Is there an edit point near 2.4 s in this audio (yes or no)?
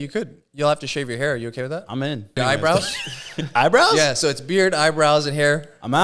yes